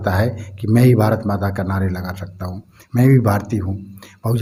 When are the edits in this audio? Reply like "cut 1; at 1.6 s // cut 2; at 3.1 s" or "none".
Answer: none

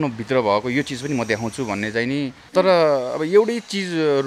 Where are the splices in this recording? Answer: cut 1; at 2.4 s

